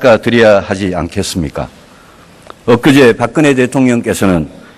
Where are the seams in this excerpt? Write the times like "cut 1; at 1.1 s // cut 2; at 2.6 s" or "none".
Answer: cut 1; at 3.0 s